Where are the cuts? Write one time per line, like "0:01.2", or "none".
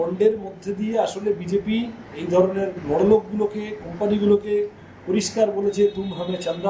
none